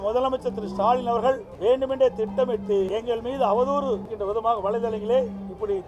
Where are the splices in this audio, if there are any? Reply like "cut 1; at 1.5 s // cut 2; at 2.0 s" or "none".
cut 1; at 1.5 s // cut 2; at 2.9 s // cut 3; at 4.1 s